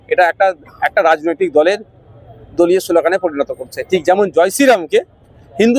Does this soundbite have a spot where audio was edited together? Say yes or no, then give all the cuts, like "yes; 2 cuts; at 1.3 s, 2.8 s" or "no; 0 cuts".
no; 0 cuts